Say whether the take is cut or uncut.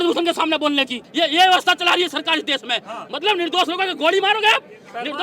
cut